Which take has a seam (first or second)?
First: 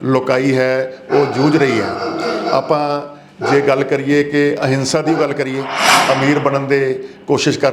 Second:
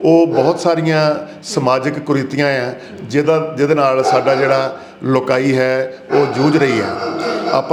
first